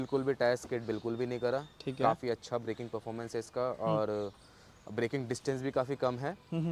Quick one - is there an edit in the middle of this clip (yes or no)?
no